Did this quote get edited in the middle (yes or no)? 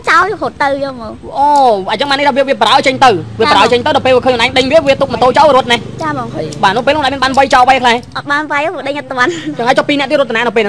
no